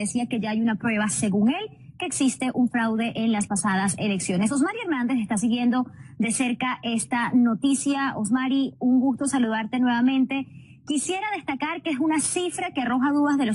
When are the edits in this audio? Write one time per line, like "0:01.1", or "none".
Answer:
none